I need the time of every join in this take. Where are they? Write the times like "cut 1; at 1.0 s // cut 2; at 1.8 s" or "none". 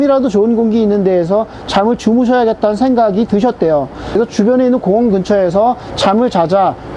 cut 1; at 4.0 s